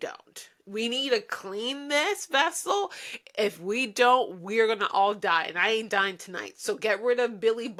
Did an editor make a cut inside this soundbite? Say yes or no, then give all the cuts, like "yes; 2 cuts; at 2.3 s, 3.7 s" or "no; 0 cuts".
no; 0 cuts